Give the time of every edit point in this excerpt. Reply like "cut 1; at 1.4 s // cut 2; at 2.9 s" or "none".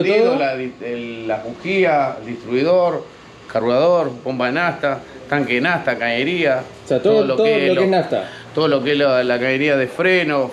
none